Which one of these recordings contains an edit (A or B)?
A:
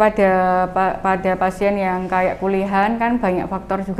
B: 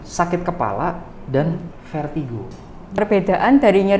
B